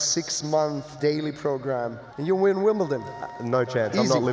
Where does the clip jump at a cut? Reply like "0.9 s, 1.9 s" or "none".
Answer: 0.9 s, 2.0 s